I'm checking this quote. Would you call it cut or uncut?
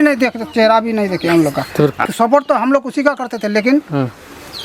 cut